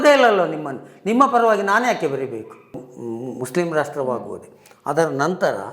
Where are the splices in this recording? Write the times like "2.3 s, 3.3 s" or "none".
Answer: 2.9 s